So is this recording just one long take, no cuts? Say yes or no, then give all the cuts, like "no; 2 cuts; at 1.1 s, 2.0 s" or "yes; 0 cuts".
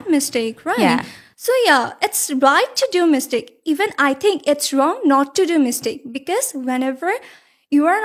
yes; 0 cuts